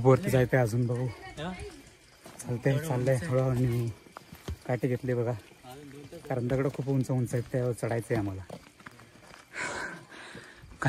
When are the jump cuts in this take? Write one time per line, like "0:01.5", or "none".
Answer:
none